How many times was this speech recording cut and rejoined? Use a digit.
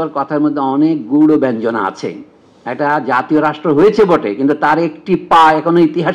0